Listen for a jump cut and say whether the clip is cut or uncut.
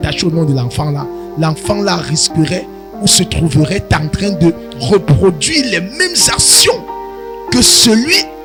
uncut